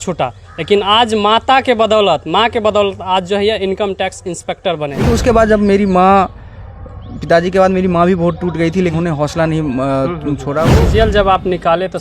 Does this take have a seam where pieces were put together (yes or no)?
yes